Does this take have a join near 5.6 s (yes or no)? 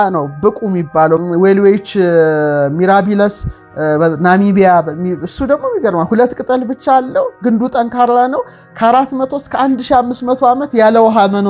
no